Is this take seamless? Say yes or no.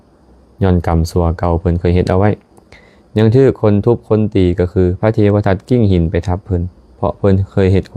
yes